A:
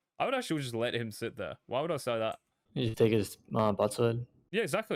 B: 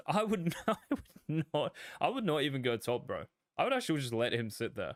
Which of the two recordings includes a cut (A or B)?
A